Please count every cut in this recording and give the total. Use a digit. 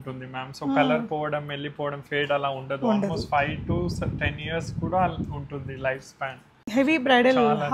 1